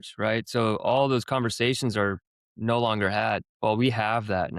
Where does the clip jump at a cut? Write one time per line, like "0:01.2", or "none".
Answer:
0:03.5